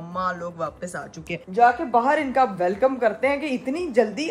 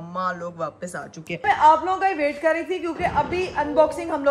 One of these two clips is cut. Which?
second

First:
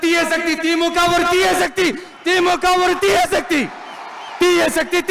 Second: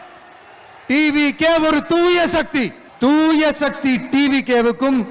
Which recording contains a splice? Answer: second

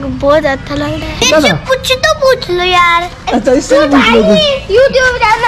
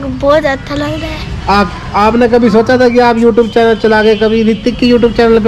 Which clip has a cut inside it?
first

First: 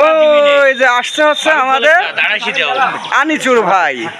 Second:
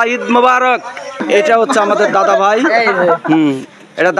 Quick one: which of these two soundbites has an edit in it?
second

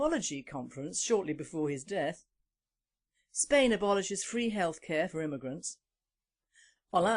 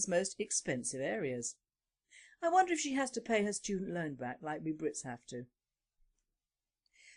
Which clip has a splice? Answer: first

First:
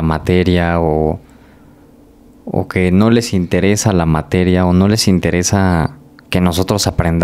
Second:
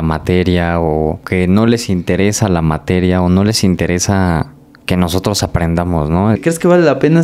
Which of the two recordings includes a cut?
second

